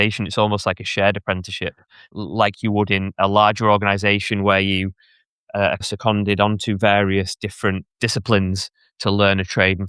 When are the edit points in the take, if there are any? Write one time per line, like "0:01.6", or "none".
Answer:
0:02.1
0:03.1
0:05.8
0:07.9